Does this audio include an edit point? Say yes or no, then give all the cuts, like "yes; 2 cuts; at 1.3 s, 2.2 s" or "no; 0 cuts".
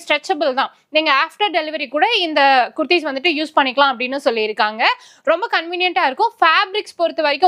no; 0 cuts